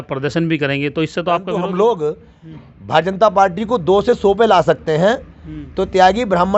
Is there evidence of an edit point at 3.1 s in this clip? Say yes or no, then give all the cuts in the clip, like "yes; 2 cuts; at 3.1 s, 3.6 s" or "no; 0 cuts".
no; 1 cut; at 1.5 s